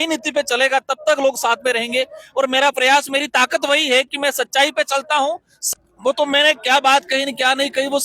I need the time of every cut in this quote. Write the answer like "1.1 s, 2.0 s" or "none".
5.5 s